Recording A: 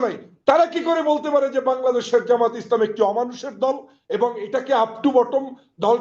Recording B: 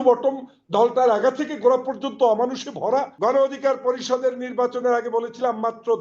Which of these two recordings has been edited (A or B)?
B